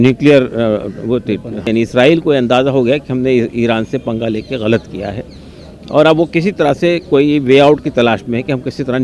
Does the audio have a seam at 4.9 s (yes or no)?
no